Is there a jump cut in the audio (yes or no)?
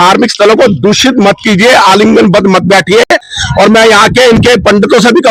no